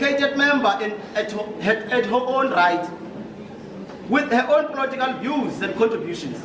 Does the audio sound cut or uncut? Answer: uncut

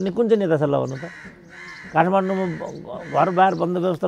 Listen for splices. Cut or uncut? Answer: uncut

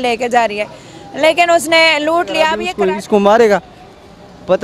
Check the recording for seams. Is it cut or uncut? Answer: cut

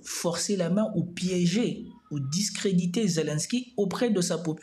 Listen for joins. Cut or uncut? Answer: uncut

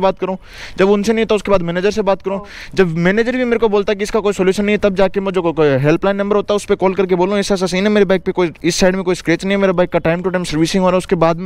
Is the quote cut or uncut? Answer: uncut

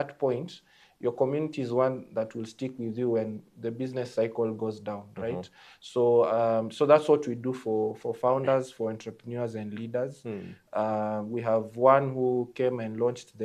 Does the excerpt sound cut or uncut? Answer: uncut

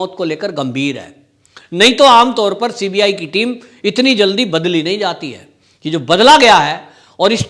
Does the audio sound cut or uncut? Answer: uncut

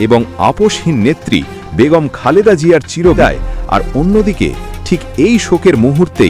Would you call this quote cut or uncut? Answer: cut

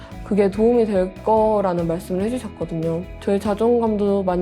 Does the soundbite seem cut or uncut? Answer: cut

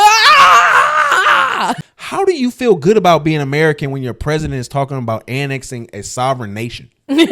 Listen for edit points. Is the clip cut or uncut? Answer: cut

